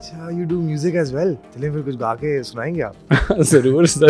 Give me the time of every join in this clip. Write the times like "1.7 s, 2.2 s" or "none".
1.5 s